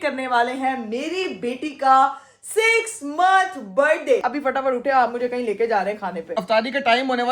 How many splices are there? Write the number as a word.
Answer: two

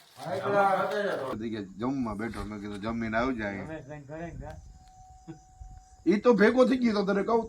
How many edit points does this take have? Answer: one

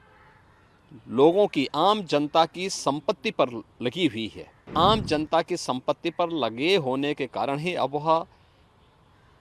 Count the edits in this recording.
one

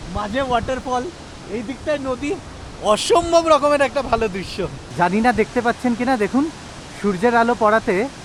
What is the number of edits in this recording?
zero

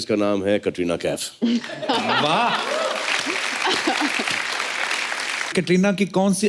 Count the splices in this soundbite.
one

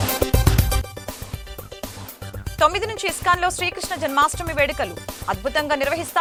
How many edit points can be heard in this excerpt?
zero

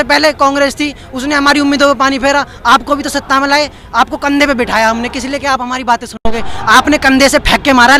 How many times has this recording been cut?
zero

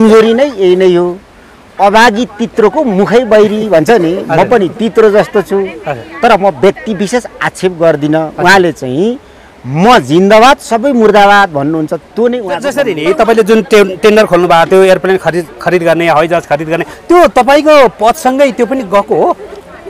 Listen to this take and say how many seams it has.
one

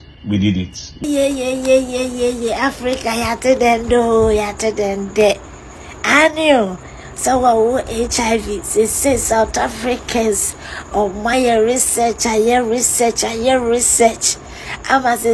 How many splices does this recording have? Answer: one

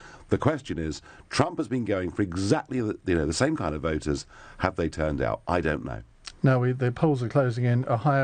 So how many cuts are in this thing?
one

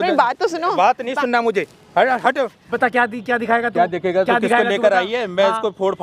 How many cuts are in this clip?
one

